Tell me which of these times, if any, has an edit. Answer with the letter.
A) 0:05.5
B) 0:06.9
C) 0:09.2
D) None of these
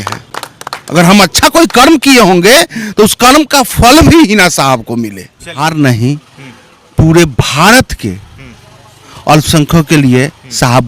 A